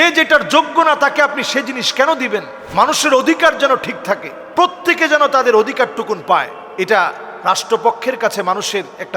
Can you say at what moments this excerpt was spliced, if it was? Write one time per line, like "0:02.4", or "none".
0:02.6

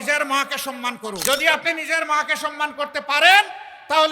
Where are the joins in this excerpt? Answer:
0:01.2

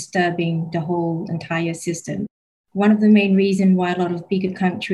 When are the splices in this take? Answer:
0:02.6

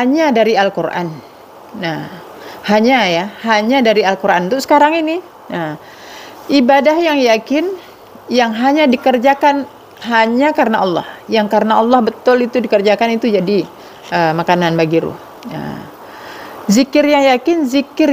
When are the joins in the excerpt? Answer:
none

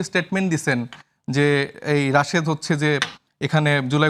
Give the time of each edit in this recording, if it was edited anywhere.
none

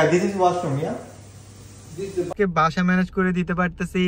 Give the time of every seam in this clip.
0:02.3

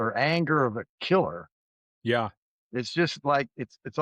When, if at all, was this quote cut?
none

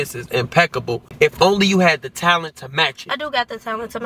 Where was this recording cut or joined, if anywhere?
0:01.1

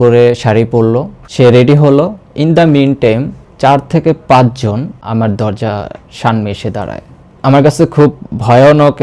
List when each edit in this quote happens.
0:01.3
0:05.0
0:07.2

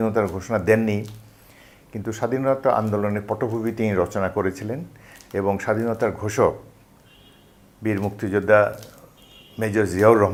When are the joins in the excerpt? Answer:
none

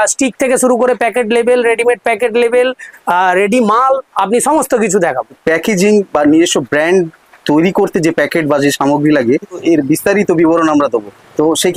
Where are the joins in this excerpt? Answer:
none

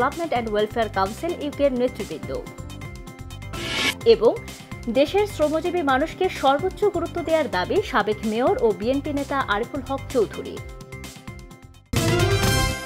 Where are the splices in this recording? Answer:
0:11.9

